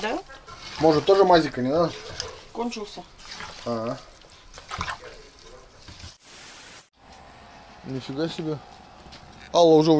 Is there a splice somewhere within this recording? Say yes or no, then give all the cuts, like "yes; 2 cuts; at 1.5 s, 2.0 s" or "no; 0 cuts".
yes; 1 cut; at 6.1 s